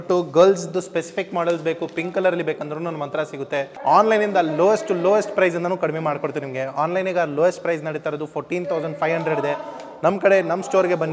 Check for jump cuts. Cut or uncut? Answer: cut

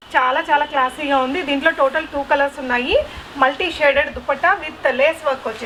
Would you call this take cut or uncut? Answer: uncut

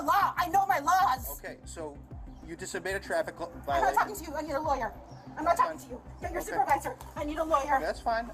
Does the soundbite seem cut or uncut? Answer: uncut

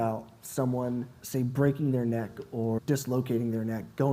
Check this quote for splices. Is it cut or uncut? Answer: cut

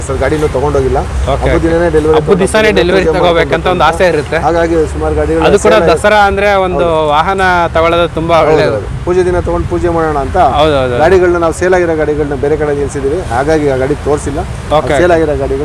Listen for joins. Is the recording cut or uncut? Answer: uncut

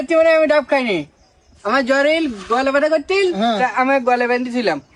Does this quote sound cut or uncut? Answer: uncut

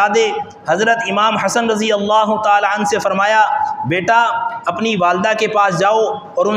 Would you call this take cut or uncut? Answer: uncut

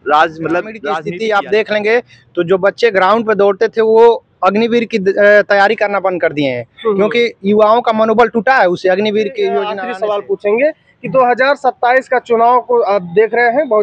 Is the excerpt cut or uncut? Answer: cut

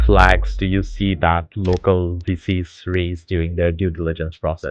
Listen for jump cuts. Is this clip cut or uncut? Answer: uncut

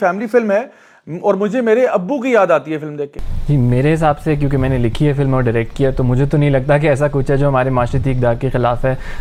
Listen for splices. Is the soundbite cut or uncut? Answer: uncut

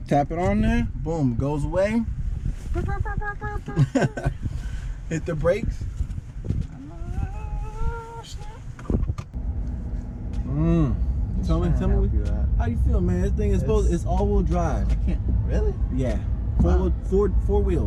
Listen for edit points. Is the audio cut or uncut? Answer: uncut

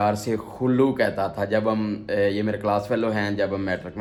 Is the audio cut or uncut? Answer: uncut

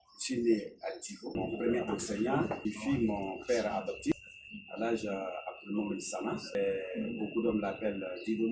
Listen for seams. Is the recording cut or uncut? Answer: cut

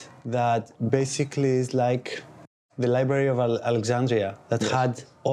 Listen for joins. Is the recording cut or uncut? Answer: uncut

